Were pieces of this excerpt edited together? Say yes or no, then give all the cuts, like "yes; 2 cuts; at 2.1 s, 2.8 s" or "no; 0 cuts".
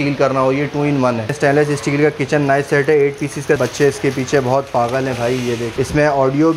yes; 3 cuts; at 1.3 s, 3.6 s, 5.7 s